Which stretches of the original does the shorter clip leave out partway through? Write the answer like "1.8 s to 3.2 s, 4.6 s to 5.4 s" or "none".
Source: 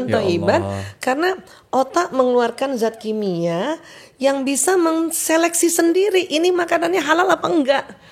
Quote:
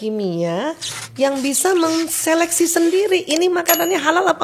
none